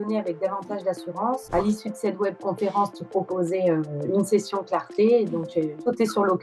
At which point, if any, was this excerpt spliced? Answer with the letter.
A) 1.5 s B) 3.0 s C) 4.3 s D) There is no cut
A